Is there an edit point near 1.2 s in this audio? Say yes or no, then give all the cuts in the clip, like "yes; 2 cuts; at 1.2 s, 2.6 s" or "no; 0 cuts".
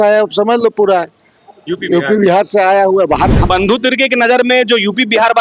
no; 1 cut; at 3.4 s